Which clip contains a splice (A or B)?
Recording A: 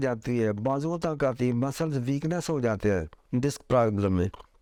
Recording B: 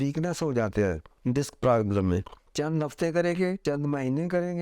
B